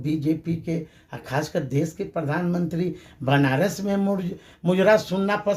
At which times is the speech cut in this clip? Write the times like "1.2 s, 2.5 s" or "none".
none

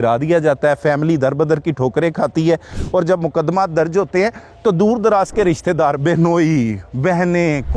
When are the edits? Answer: none

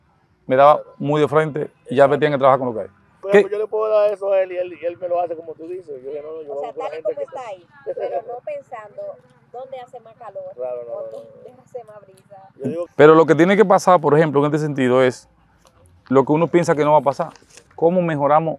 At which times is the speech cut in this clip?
3.1 s, 12.8 s

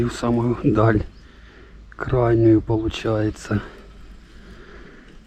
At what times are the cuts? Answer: none

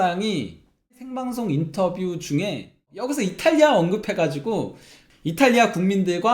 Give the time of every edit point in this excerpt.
1.0 s, 3.0 s

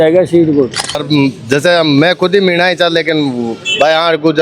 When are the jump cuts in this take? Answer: 1.0 s

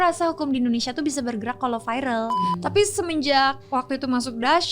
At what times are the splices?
2.5 s

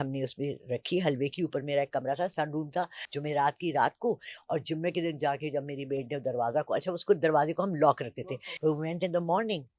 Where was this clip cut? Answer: 3.0 s, 8.1 s

